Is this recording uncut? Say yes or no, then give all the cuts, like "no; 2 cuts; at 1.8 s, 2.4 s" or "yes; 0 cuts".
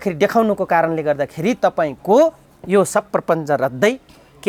yes; 0 cuts